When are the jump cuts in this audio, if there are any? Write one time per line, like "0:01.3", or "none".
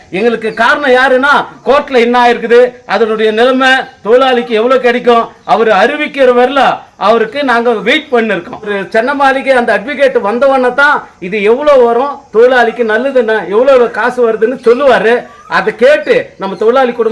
0:01.5
0:08.7